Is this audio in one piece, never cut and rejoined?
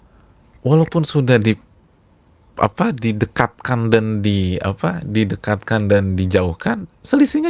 yes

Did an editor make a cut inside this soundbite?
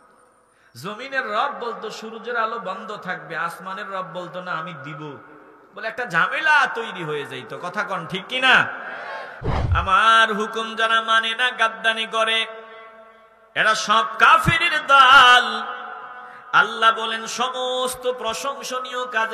yes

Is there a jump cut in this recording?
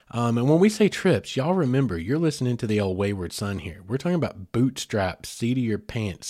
no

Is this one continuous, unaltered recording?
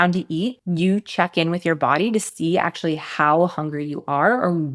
yes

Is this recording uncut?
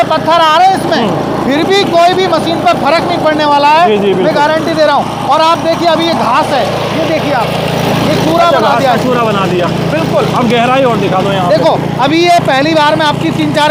yes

